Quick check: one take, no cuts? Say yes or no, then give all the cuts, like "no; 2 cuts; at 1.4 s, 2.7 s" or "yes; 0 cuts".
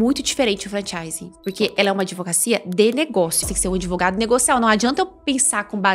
no; 1 cut; at 3.5 s